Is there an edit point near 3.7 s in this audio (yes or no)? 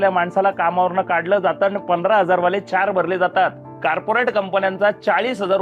yes